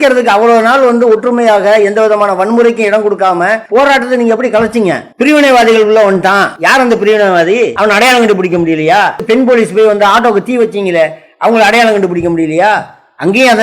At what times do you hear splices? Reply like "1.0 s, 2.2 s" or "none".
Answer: 3.6 s, 5.1 s, 6.5 s, 7.7 s, 9.2 s